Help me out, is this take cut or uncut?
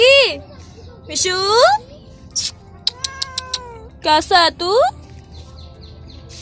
uncut